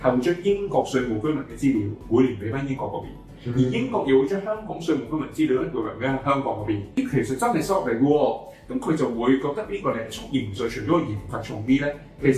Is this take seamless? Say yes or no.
no